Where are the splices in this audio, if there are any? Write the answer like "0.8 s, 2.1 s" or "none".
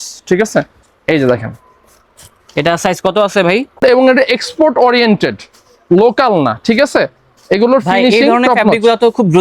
3.8 s